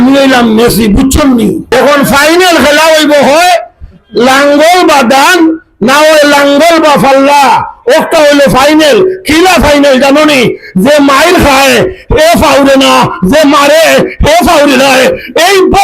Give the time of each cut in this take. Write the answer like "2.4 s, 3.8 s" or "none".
1.7 s